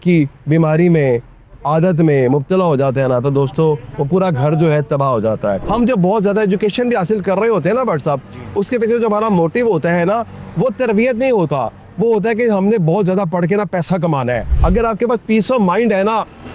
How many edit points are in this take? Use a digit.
2